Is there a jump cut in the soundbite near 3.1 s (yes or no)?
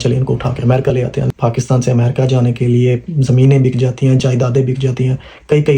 no